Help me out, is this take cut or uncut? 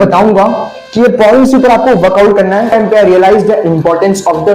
cut